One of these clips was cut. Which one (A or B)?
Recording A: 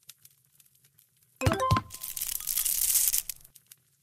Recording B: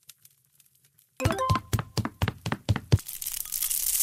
B